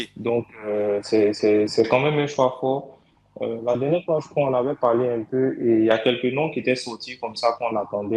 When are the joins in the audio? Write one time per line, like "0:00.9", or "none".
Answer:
none